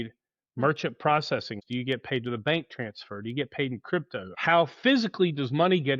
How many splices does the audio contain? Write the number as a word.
two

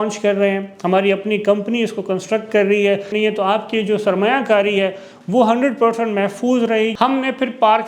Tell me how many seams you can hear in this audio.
two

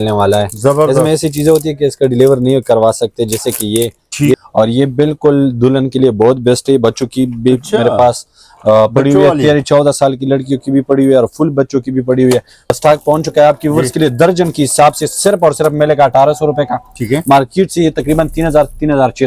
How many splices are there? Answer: two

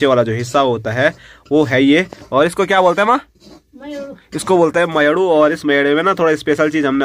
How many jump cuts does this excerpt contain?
zero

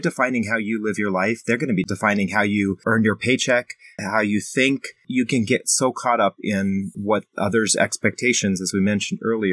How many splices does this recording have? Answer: five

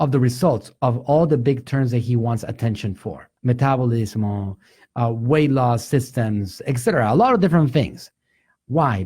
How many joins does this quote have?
one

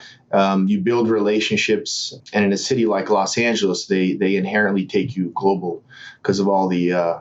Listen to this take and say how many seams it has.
one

